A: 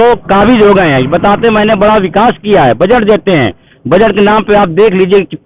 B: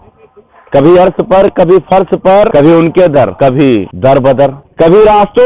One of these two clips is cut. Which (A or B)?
B